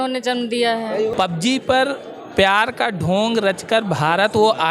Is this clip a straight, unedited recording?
no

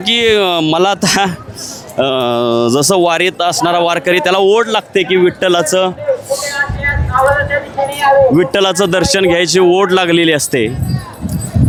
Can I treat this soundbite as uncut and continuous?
yes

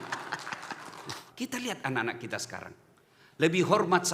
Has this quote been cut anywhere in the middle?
yes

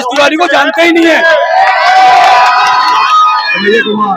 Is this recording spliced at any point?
no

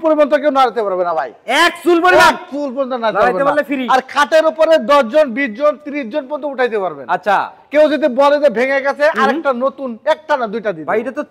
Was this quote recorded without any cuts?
yes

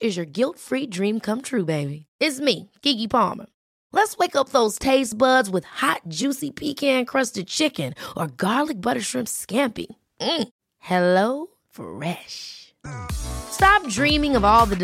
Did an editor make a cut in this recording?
no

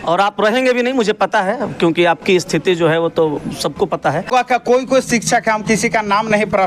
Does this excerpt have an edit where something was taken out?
yes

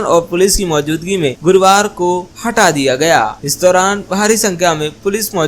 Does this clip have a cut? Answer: no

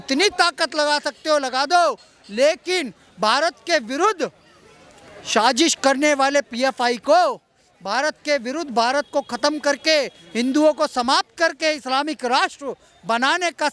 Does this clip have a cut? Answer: no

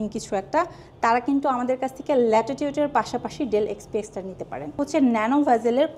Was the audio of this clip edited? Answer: yes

